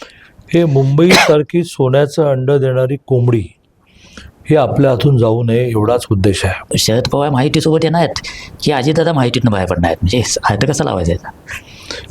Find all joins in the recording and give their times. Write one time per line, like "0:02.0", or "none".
0:06.7